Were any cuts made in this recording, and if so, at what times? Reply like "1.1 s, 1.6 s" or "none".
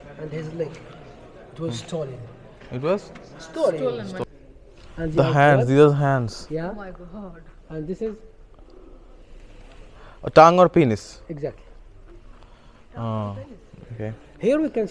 4.2 s, 13.7 s

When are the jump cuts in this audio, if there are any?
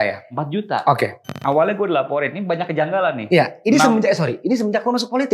1.3 s

